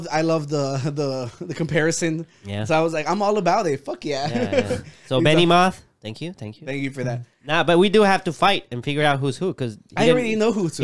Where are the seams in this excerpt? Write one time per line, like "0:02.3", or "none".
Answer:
none